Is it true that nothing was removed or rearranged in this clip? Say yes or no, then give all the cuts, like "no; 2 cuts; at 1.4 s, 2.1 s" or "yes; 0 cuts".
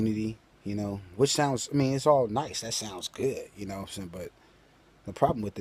no; 1 cut; at 1.0 s